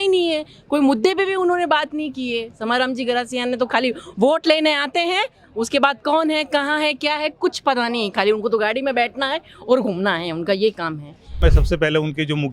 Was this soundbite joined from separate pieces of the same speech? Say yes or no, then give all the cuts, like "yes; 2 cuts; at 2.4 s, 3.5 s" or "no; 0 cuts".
yes; 1 cut; at 11.4 s